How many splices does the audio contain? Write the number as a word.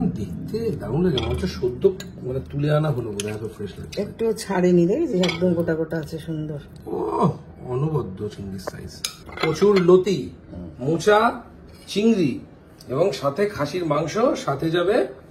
zero